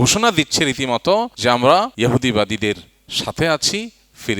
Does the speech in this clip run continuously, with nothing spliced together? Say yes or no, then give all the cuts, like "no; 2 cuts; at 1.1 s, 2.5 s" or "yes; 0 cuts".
no; 2 cuts; at 1.3 s, 1.9 s